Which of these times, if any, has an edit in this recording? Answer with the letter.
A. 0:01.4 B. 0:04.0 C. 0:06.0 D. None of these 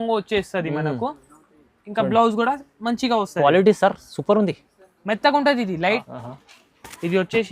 C